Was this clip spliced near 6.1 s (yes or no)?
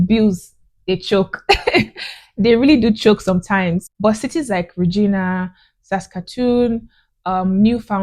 no